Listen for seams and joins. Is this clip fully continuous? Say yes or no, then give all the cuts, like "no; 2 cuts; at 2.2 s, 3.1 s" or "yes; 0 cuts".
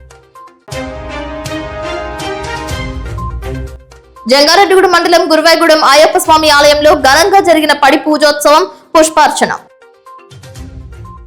yes; 0 cuts